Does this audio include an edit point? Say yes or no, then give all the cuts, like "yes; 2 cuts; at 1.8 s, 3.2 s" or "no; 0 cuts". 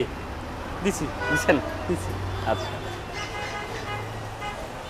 no; 0 cuts